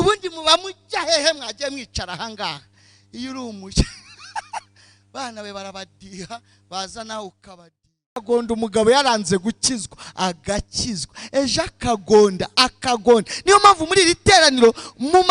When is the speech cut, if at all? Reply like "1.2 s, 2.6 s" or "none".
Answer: 8.2 s